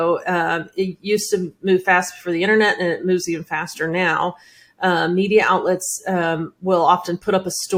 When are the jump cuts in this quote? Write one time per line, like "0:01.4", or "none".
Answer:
none